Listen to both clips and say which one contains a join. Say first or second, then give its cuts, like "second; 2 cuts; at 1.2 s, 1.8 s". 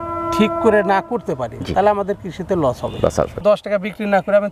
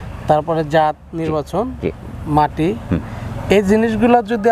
first; 1 cut; at 3.4 s